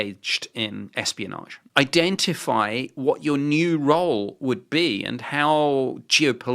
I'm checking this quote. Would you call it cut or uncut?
cut